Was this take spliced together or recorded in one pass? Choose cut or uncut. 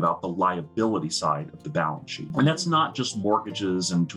cut